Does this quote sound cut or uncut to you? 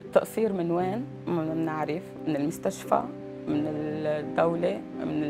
cut